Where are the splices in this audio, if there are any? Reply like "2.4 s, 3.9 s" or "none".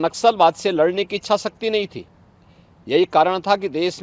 none